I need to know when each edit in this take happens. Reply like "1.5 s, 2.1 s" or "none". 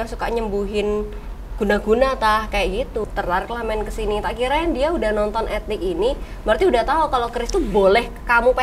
3.0 s